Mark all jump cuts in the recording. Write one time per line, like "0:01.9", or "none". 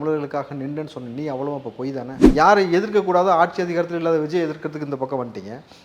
0:02.2